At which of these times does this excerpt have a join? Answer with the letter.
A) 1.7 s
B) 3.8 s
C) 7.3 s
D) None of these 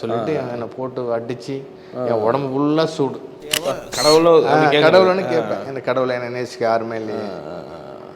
B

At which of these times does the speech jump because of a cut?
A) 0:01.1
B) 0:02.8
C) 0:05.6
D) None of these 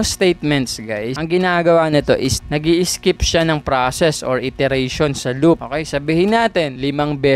A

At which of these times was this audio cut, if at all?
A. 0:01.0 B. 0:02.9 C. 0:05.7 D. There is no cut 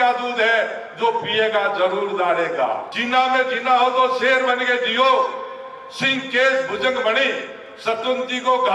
B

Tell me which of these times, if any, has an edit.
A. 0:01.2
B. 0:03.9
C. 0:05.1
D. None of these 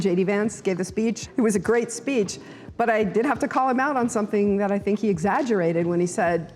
A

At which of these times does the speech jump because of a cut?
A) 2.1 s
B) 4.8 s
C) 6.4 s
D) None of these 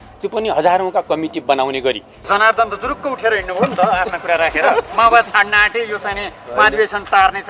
A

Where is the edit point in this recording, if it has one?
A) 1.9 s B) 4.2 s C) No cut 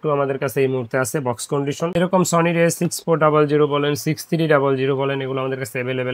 A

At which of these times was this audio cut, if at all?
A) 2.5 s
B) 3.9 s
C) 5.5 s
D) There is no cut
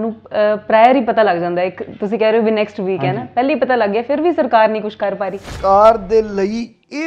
C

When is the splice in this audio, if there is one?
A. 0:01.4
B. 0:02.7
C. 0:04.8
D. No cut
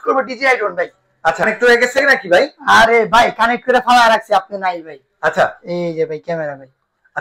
A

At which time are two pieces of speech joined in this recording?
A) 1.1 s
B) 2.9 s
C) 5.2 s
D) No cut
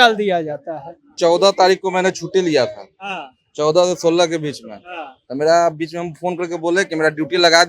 A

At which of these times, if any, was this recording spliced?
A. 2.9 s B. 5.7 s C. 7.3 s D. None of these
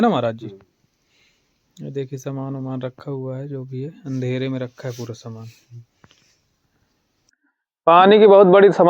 C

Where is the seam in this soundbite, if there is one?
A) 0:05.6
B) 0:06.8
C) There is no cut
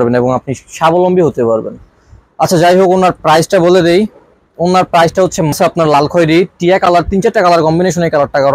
A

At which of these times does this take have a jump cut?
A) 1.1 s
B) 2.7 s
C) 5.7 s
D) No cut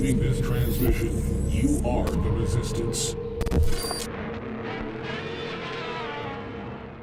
D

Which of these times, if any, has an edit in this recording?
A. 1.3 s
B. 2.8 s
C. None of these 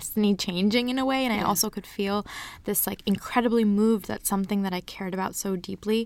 C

